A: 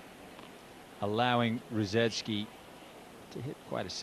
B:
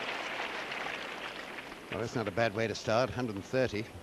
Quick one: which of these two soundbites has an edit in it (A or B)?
A